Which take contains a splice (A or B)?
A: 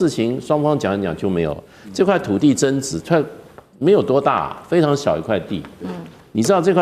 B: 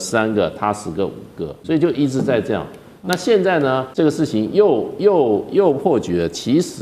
B